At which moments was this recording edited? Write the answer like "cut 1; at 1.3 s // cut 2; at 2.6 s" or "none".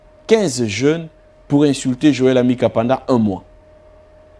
none